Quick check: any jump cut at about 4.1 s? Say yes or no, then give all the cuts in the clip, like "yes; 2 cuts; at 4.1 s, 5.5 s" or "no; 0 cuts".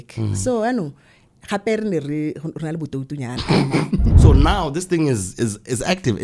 yes; 1 cut; at 4.1 s